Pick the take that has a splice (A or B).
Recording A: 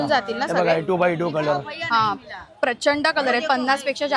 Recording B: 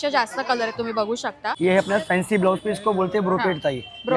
B